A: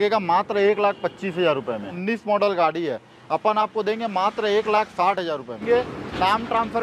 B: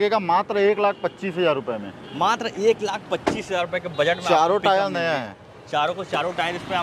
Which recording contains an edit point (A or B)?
A